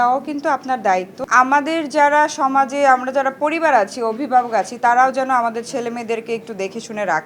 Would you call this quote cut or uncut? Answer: uncut